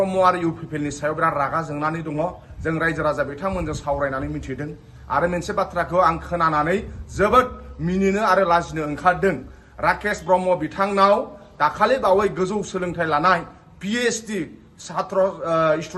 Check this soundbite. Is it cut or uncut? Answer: uncut